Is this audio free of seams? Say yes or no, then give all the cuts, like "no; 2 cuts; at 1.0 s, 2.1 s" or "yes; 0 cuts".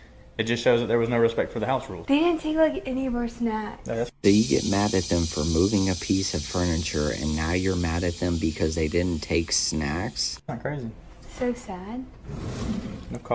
yes; 0 cuts